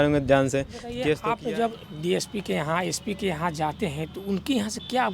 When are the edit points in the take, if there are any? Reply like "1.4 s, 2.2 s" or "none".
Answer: 0.9 s